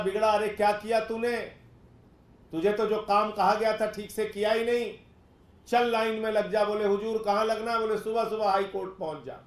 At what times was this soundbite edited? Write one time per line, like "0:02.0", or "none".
none

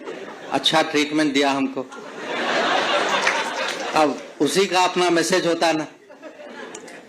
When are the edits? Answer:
none

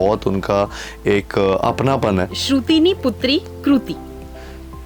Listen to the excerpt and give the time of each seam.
0:02.3

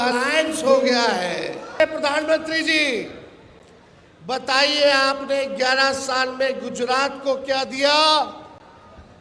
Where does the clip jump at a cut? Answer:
0:01.8

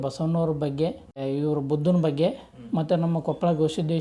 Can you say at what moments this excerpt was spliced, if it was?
0:01.2

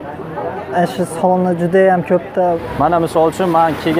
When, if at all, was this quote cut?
0:02.6

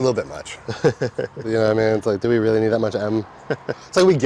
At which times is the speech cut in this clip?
none

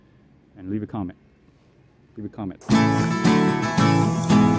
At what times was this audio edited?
0:02.6

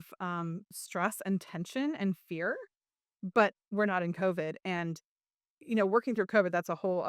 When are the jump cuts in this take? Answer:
none

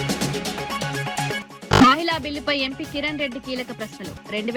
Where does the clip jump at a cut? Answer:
none

